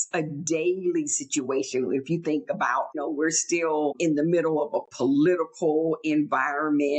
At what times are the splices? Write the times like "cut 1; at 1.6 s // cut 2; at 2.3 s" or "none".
cut 1; at 3.0 s // cut 2; at 4.0 s

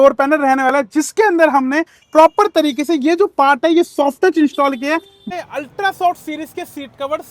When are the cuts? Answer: cut 1; at 5.3 s

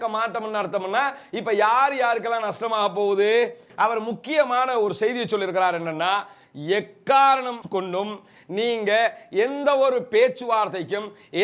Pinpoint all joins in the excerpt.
cut 1; at 3.7 s

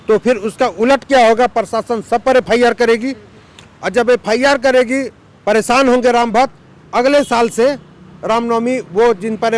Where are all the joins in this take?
none

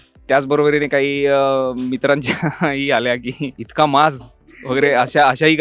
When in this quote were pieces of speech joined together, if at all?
cut 1; at 3.6 s

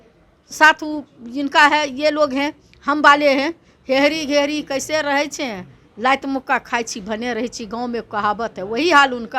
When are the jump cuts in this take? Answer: cut 1; at 3.7 s

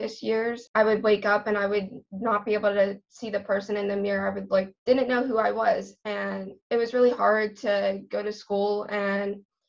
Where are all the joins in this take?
cut 1; at 4.7 s

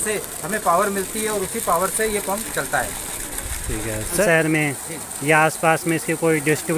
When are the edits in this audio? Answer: cut 1; at 4.2 s

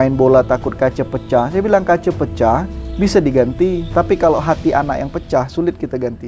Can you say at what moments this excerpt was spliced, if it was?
none

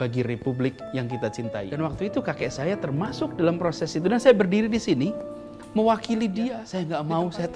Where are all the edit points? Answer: cut 1; at 1.7 s // cut 2; at 6.6 s

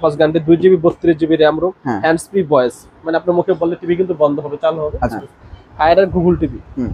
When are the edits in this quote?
cut 1; at 5.1 s

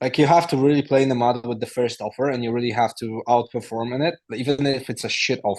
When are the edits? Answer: none

